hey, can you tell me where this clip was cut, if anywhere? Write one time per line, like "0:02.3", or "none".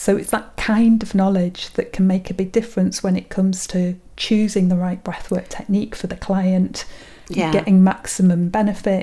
none